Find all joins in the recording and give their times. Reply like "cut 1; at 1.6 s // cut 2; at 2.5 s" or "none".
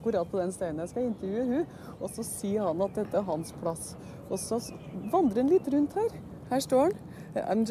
cut 1; at 3.6 s